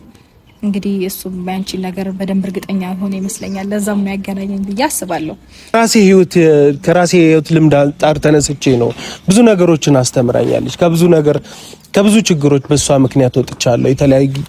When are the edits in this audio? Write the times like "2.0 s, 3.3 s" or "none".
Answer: 5.7 s